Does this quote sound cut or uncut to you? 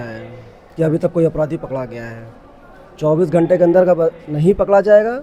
uncut